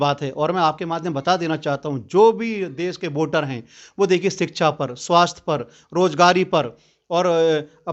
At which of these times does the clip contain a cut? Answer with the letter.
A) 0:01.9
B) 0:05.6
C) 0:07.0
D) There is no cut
D